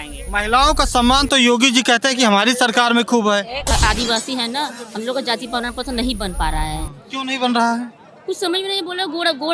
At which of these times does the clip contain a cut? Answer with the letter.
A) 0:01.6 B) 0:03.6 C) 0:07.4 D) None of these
B